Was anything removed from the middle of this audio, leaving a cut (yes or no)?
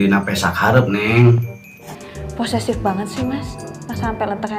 no